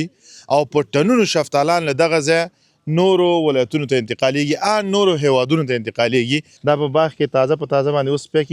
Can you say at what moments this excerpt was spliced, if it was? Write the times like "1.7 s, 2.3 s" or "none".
6.5 s

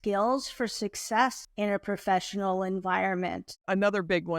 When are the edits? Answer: 1.4 s, 3.6 s

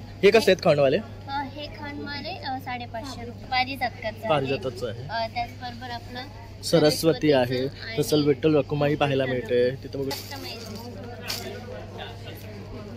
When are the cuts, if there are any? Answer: 3.3 s, 10.2 s

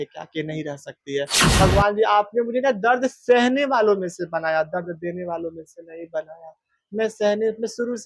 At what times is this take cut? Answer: 1.4 s

